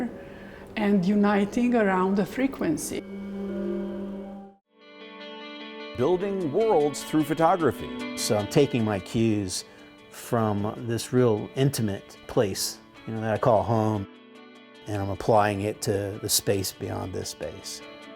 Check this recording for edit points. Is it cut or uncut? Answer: cut